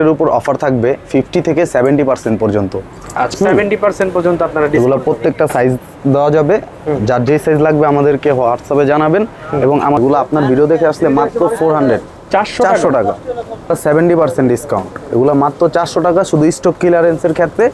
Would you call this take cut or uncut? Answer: cut